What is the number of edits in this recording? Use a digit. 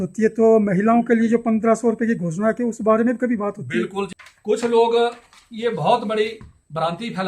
1